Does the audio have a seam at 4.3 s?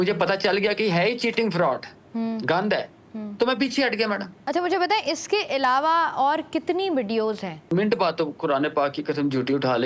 yes; 2 cuts; at 4.3 s, 7.7 s

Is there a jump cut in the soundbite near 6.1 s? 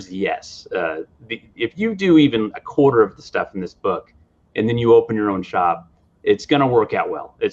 no; 0 cuts

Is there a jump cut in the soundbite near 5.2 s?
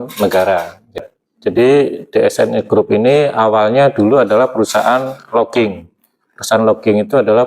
no; 1 cut; at 1.0 s

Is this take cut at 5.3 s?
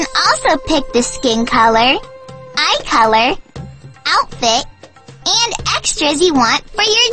no; 0 cuts

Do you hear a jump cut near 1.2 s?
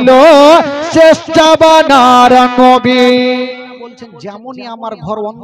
no; 1 cut; at 4.1 s

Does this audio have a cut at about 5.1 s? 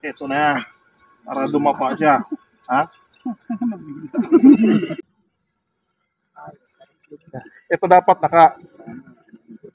yes; 1 cut; at 5.1 s

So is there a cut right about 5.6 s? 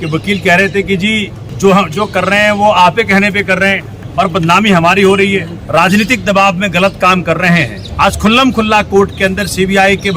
yes; 4 cuts; at 1.4 s, 3.9 s, 5.6 s, 7.8 s

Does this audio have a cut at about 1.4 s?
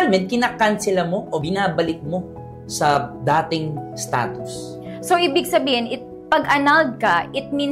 yes; 1 cut; at 1.4 s

